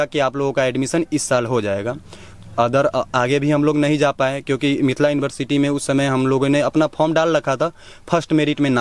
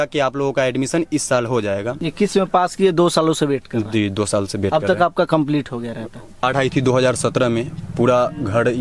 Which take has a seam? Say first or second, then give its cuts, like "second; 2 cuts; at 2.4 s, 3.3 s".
second; 2 cuts; at 2.0 s, 6.4 s